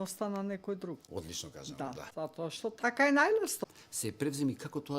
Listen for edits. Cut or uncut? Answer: cut